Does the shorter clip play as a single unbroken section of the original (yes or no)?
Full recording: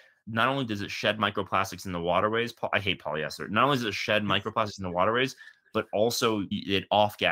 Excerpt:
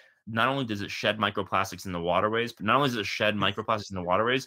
no